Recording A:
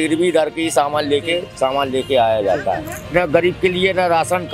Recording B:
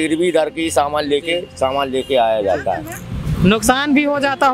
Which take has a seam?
A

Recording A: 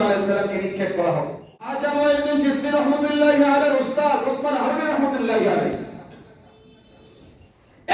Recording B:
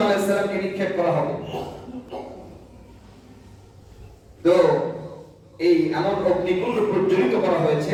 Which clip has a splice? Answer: A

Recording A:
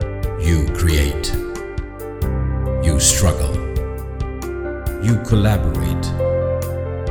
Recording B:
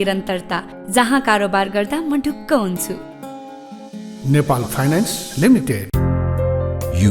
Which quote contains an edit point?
B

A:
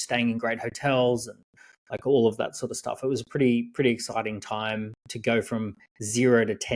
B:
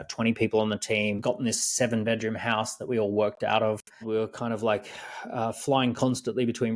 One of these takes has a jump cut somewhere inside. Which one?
B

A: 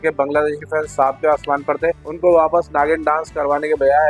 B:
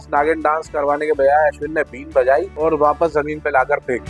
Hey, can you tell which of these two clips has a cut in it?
B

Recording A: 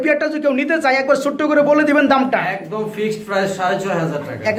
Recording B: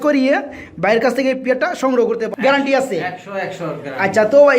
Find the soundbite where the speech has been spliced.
B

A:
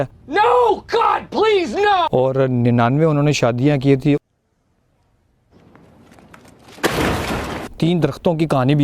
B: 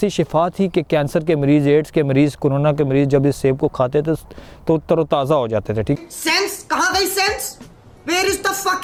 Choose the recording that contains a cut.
A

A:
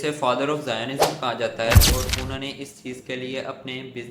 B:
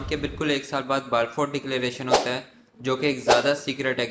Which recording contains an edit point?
A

